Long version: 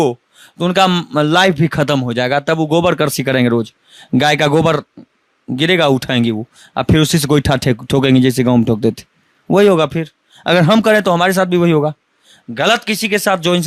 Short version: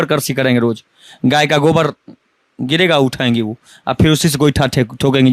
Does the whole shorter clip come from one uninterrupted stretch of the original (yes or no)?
yes